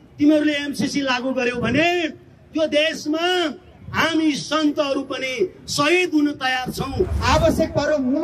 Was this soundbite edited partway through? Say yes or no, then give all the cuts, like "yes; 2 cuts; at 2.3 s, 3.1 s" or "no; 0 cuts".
yes; 1 cut; at 7.2 s